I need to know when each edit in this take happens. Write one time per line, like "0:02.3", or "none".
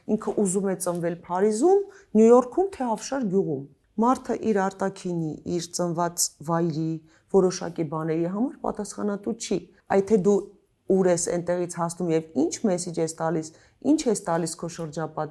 none